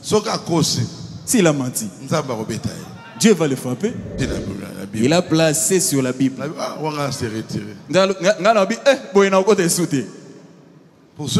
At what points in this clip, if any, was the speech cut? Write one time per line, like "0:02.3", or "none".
0:04.2